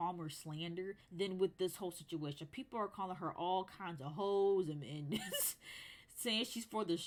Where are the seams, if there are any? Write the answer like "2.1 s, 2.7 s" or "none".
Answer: none